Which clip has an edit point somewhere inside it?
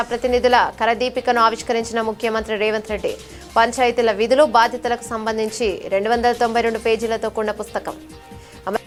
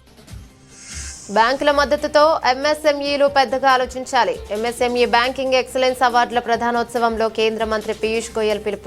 second; 1 cut; at 1.0 s

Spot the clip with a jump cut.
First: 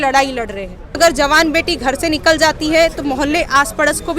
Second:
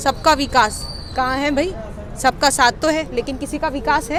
first; 1 cut; at 1.0 s

